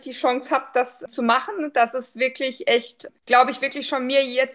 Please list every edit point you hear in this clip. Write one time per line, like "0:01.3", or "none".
0:01.0
0:03.0